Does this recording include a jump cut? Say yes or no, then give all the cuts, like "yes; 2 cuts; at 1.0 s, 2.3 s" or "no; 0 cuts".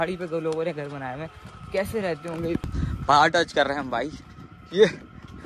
yes; 1 cut; at 2.6 s